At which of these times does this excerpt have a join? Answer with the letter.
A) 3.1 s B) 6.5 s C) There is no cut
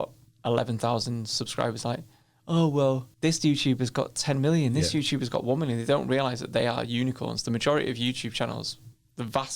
A